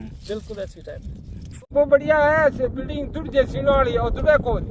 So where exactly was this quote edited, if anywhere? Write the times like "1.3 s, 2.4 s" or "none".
1.6 s